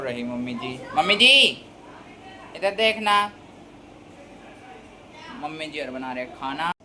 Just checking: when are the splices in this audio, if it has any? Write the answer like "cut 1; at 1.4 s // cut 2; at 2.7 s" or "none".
none